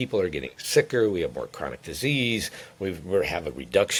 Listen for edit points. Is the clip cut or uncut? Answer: uncut